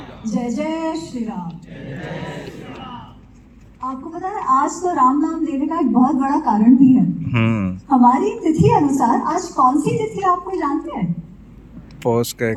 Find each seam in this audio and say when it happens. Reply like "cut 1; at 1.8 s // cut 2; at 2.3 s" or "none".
none